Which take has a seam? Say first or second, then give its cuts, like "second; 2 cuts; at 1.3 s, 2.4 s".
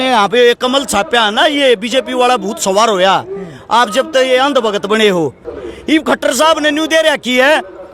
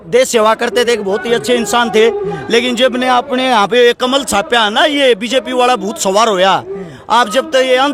first; 1 cut; at 5.5 s